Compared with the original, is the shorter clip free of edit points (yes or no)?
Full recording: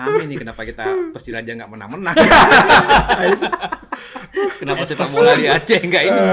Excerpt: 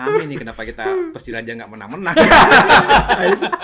yes